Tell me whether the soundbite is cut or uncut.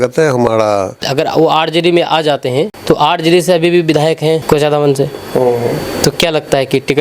cut